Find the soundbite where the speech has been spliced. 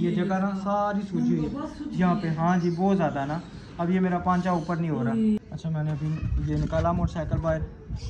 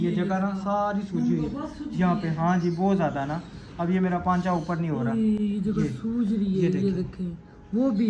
first; 1 cut; at 5.4 s

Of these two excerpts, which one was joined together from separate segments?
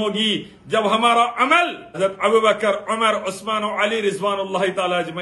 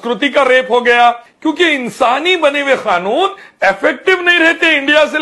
first; 1 cut; at 2.0 s

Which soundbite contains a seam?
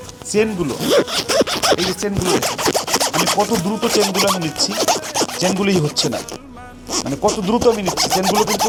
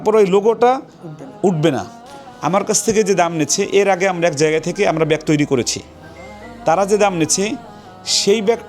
second; 1 cut; at 2.0 s

